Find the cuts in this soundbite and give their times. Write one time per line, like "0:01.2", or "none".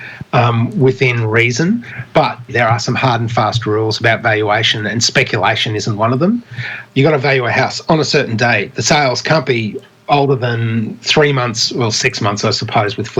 0:02.5
0:06.8